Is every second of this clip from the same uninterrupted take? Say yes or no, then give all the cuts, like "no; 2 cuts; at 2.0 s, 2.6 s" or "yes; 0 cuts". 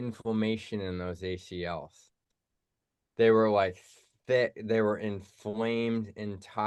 yes; 0 cuts